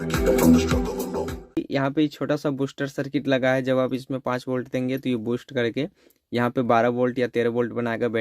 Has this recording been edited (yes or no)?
yes